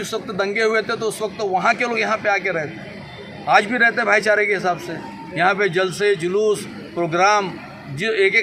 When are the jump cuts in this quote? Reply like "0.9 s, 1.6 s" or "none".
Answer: none